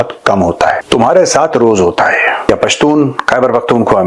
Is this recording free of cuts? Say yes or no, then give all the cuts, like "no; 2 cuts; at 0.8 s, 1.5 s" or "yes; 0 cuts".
no; 2 cuts; at 0.8 s, 2.5 s